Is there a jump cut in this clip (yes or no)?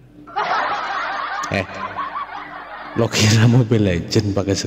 no